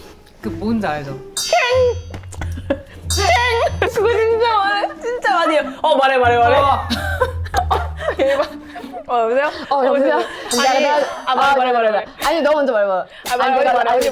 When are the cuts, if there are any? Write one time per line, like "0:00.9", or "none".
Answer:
0:03.9
0:07.4